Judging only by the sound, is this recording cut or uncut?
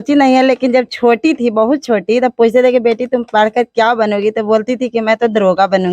uncut